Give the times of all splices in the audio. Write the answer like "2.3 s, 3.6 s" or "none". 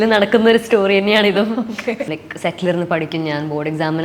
2.1 s